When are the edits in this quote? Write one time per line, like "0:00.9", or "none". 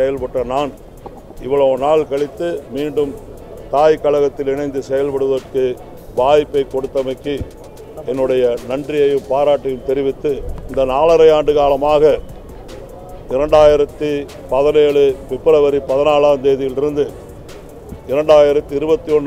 0:10.5